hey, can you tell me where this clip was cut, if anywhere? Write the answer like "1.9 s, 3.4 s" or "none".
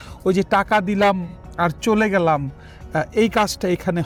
none